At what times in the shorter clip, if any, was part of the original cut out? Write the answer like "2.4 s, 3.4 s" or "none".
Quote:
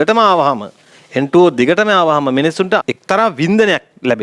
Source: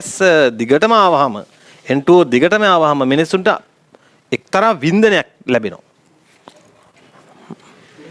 2.9 s